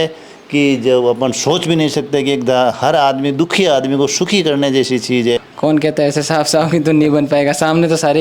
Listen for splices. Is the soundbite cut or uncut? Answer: cut